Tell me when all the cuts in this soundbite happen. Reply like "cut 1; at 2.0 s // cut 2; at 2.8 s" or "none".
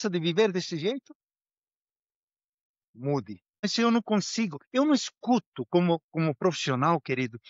cut 1; at 3.6 s